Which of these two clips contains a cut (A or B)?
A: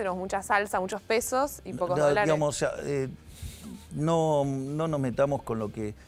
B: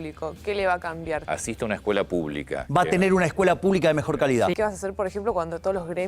B